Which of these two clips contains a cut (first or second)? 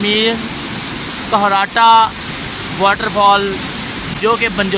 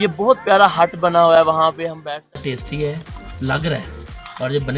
second